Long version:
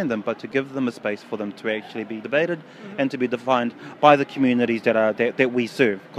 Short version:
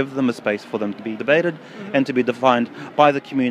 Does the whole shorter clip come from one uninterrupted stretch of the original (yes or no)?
no